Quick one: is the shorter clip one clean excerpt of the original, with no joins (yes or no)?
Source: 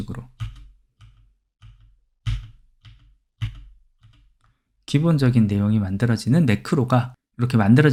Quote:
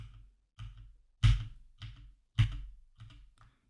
yes